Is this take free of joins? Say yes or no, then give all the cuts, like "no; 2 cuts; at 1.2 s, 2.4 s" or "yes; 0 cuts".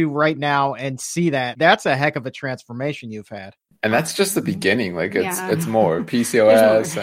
no; 2 cuts; at 1.5 s, 3.6 s